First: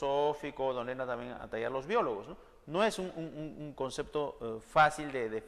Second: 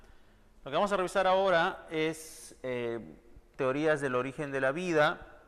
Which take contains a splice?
first; 1 cut; at 1.3 s

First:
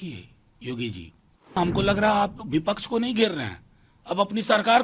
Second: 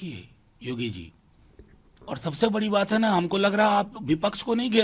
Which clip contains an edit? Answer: first; 1 cut; at 1.6 s

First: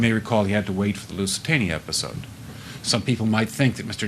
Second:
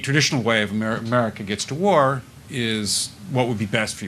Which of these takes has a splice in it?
first; 1 cut; at 2.6 s

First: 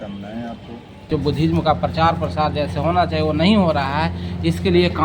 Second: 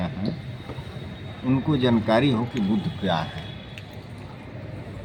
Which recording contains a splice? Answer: first; 1 cut; at 1.1 s

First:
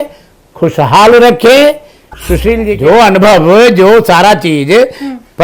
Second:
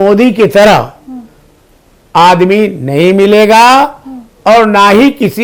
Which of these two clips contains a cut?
first; 1 cut; at 2.7 s

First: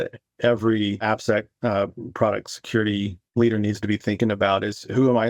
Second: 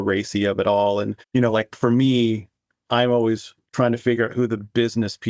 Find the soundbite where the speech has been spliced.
first; 1 cut; at 1.0 s

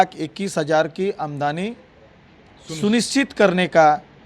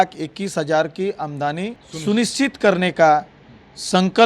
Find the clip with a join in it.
second; 1 cut; at 1.8 s

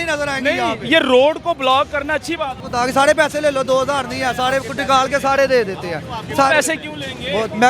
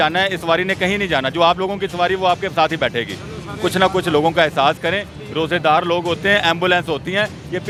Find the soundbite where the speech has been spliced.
first; 1 cut; at 2.6 s

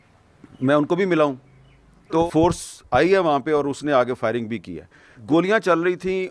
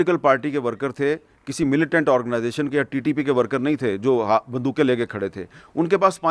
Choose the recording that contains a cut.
first; 2 cuts; at 2.2 s, 5.1 s

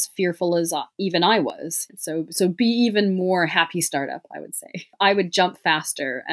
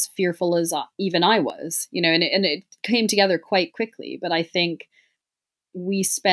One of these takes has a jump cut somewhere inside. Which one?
first; 2 cuts; at 1.8 s, 4.9 s

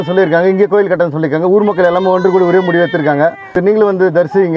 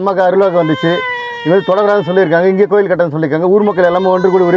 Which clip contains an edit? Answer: first; 1 cut; at 3.6 s

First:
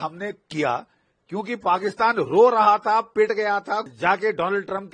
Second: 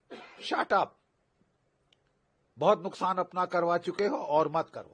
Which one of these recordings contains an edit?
first; 1 cut; at 3.9 s

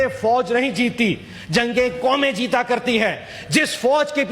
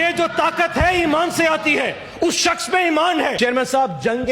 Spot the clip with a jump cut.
second; 1 cut; at 3.3 s

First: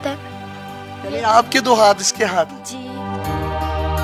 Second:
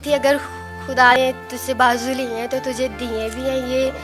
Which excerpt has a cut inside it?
second; 1 cut; at 1.1 s

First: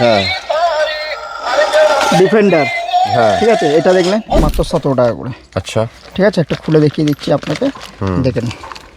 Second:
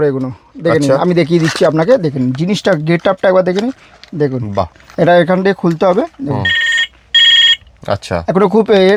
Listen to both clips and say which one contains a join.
first; 1 cut; at 4.4 s

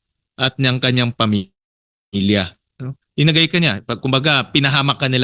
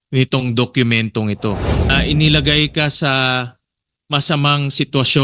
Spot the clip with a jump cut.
second; 1 cut; at 1.9 s

